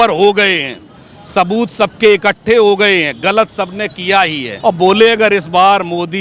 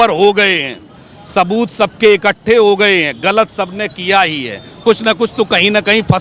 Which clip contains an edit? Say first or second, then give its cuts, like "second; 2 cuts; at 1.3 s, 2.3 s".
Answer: first; 1 cut; at 4.5 s